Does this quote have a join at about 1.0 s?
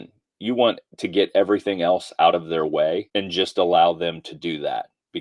no; 1 cut; at 3.1 s

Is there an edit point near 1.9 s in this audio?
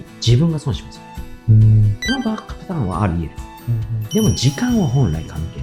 yes; 1 cut; at 1.9 s

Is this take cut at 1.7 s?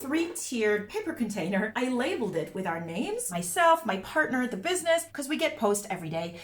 no; 0 cuts

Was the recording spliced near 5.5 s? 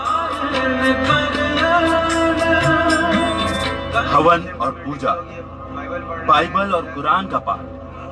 no; 0 cuts

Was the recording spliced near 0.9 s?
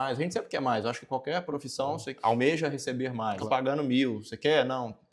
no; 1 cut; at 3.4 s

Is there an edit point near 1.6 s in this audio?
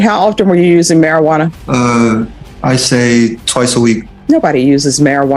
yes; 3 cuts; at 1.6 s, 2.4 s, 4.1 s

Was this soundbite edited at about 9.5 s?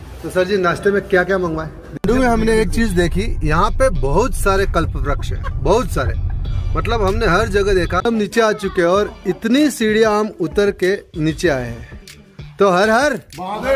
no; 2 cuts; at 1.9 s, 8.0 s

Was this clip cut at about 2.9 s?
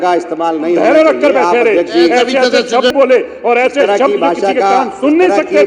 yes; 1 cut; at 2.9 s

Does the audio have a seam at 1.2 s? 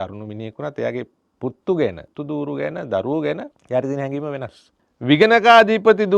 yes; 4 cuts; at 1.2 s, 2.1 s, 3.5 s, 4.9 s

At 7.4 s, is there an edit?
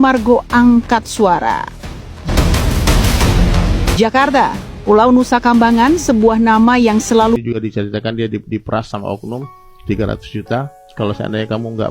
yes; 1 cut; at 7.4 s

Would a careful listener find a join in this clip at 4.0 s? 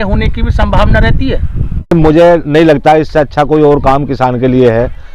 no; 1 cut; at 1.9 s

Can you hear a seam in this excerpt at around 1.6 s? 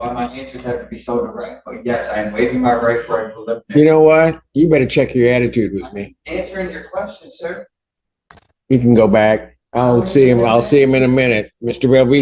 no; 0 cuts

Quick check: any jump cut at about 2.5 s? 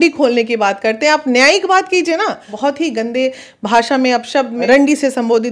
yes; 2 cuts; at 2.5 s, 4.6 s

